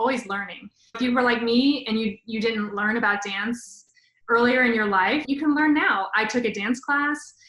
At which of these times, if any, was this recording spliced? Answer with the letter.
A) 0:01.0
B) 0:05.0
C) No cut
A